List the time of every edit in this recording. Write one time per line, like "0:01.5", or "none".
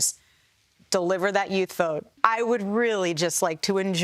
0:02.1